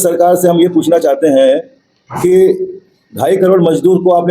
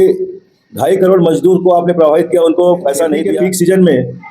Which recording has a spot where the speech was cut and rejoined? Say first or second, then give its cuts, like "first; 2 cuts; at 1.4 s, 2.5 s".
second; 1 cut; at 3.2 s